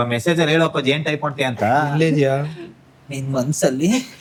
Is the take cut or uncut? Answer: uncut